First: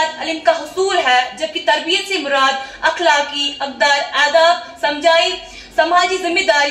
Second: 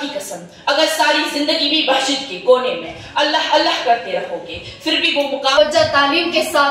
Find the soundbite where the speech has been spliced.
second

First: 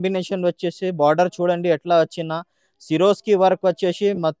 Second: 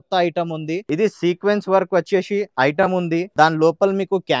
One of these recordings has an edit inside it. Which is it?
second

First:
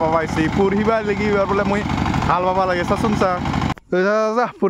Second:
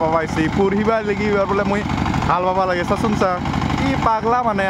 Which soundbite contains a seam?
first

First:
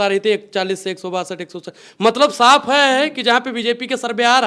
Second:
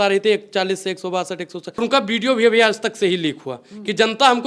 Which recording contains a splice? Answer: second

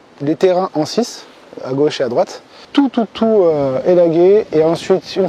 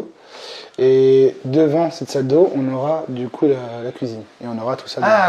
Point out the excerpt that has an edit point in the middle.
first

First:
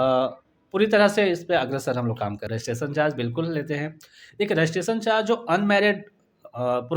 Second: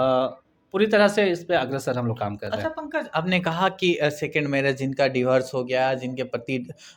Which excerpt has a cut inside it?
first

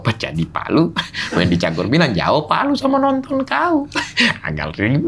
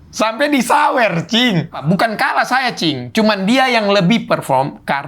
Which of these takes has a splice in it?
second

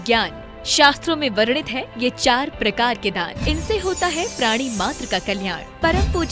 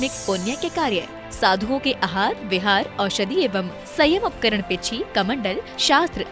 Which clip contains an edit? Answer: first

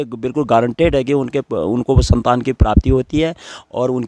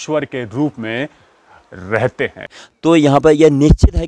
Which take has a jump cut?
second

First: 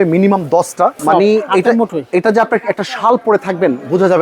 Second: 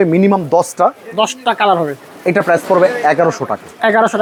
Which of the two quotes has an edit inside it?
first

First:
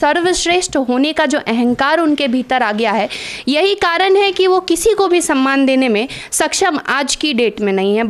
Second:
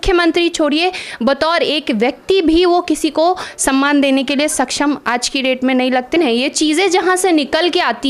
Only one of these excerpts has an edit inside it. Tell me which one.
second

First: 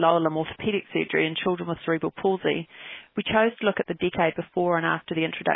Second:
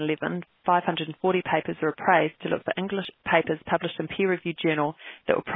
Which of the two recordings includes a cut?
second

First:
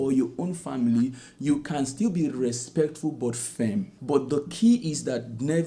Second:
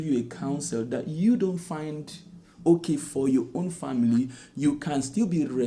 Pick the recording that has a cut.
first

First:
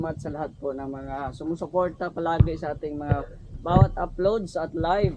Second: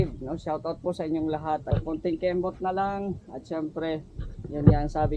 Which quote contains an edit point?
second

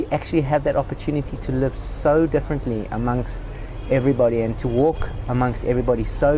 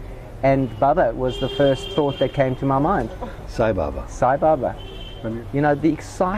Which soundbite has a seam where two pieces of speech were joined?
second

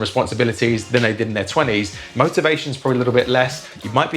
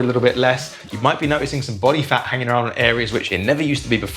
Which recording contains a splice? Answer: first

